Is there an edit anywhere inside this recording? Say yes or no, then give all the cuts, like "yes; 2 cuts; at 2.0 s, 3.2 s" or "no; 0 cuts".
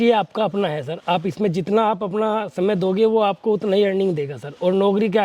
no; 0 cuts